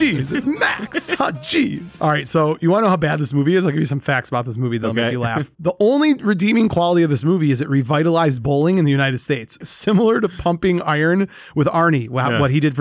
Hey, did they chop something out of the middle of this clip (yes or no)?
yes